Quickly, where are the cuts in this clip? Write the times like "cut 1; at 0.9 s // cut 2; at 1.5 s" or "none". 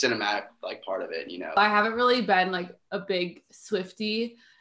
cut 1; at 1.6 s

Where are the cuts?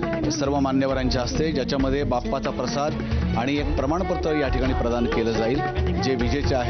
none

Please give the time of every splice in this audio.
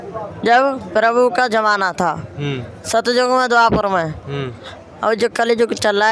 none

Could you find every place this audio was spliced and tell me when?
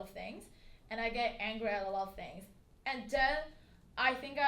none

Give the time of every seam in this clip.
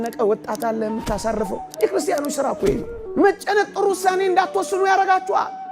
cut 1; at 3.0 s

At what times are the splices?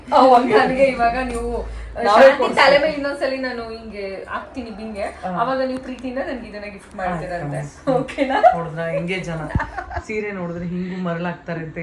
none

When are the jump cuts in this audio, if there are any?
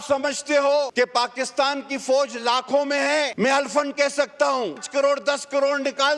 cut 1; at 0.9 s // cut 2; at 3.3 s // cut 3; at 4.8 s

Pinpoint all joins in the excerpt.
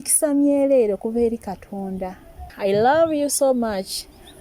cut 1; at 2.5 s

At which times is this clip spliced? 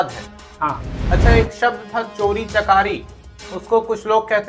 cut 1; at 0.9 s

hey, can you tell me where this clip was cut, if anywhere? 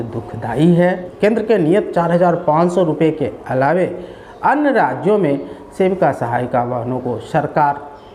cut 1; at 1.1 s

